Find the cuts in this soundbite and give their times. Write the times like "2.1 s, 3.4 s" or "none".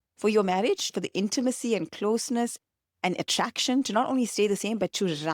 0.9 s